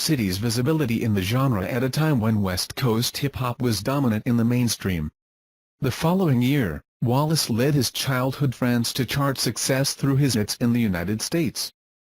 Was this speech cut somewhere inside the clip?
no; 0 cuts

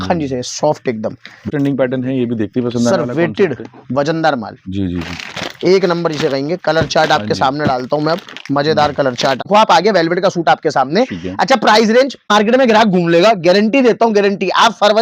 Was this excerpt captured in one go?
no; 3 cuts; at 1.5 s, 9.5 s, 12.3 s

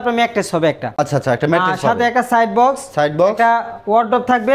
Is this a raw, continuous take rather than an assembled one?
yes; 0 cuts

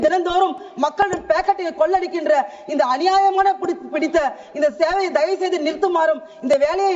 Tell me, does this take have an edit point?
no; 0 cuts

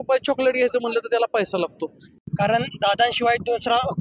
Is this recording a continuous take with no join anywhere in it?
no; 1 cut; at 2.0 s

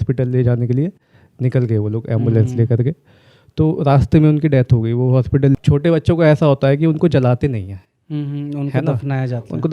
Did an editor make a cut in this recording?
yes; 1 cut; at 5.5 s

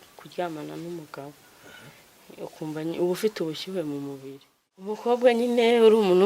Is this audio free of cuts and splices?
no; 1 cut; at 5.0 s

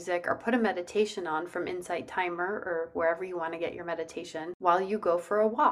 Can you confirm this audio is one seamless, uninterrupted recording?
no; 1 cut; at 4.5 s

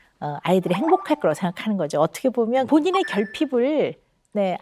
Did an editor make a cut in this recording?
yes; 1 cut; at 2.7 s

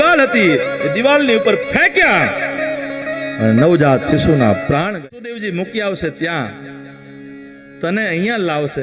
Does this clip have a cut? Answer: yes; 1 cut; at 4.9 s

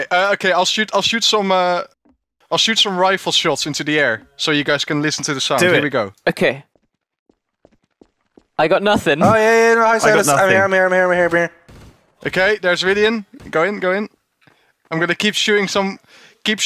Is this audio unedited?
yes; 0 cuts

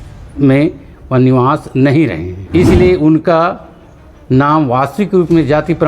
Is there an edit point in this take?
yes; 1 cut; at 2.3 s

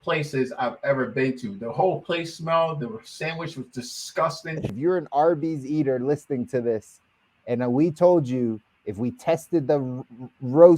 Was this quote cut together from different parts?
yes; 1 cut; at 4.7 s

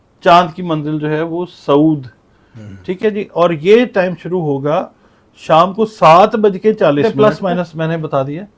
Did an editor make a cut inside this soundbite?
yes; 1 cut; at 7.0 s

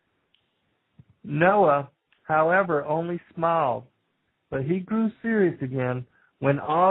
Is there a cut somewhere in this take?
no; 0 cuts

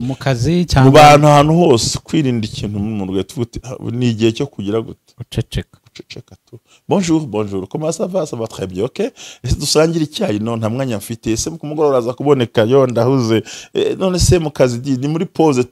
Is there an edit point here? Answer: no; 0 cuts

